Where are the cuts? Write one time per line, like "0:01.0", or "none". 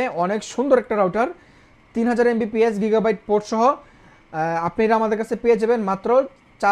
none